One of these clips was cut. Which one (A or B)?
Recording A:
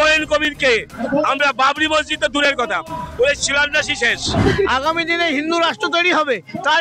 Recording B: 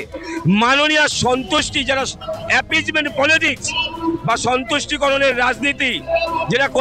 A